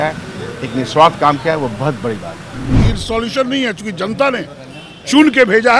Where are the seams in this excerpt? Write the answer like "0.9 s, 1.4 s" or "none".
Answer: 2.7 s